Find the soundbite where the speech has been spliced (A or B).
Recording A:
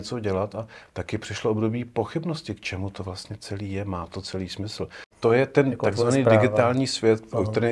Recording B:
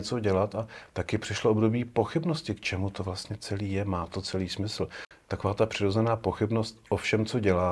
A